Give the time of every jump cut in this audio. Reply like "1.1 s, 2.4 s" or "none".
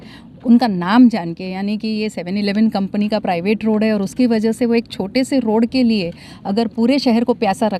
none

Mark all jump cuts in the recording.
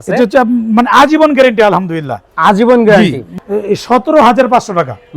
3.4 s

